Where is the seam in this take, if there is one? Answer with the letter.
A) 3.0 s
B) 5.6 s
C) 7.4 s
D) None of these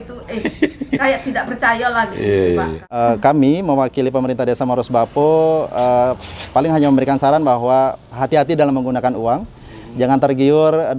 A